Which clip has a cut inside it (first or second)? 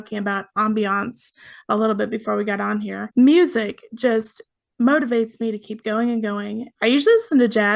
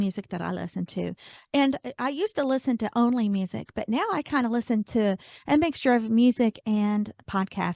first